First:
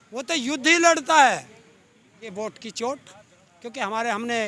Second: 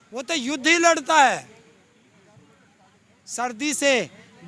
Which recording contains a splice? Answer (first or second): first